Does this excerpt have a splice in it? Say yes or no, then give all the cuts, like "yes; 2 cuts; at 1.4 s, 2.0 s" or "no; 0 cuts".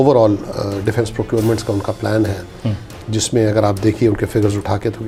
no; 0 cuts